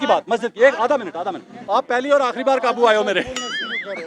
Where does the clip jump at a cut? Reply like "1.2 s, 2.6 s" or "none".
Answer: 1.5 s